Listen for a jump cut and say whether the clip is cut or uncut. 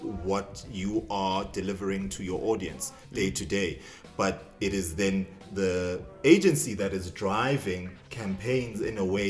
uncut